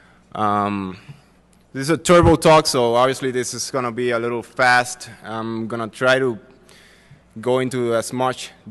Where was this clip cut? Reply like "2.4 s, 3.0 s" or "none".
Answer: none